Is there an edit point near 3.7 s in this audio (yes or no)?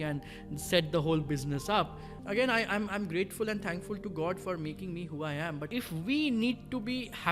no